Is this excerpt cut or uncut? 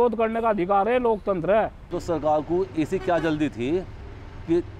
cut